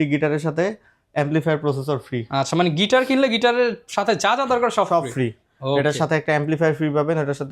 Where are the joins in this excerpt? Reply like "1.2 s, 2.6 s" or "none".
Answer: none